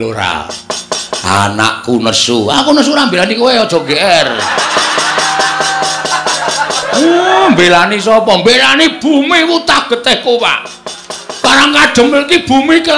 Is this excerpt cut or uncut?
cut